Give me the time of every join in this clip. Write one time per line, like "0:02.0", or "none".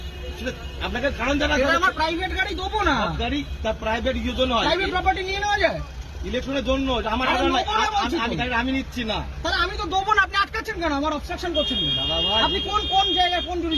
none